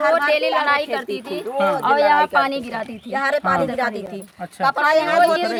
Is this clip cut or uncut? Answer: uncut